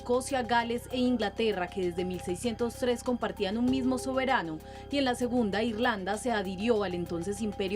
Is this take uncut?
no; 1 cut; at 1.1 s

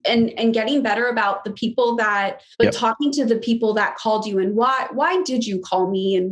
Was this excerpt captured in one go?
no; 1 cut; at 2.4 s

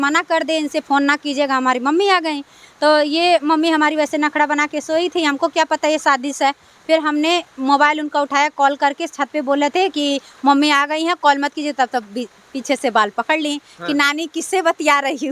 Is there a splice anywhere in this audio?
no; 0 cuts

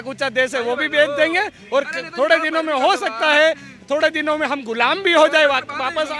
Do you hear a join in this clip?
no; 0 cuts

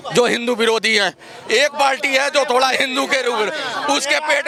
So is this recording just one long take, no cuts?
yes; 0 cuts

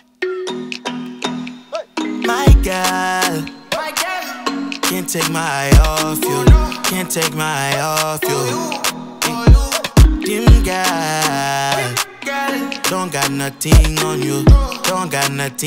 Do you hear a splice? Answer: no; 0 cuts

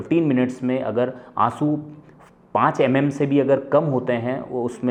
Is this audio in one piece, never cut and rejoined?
yes; 0 cuts

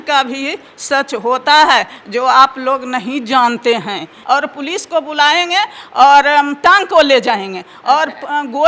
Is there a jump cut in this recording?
yes; 1 cut; at 4.2 s

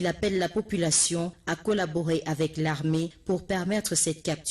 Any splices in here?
yes; 1 cut; at 3.2 s

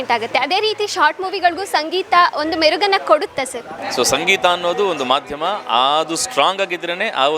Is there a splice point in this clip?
yes; 1 cut; at 3.8 s

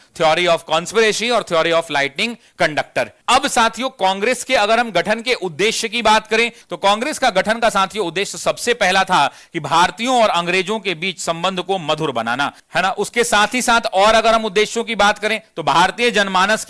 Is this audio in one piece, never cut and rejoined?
yes; 0 cuts

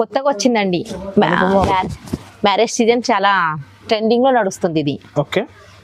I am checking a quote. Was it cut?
no; 0 cuts

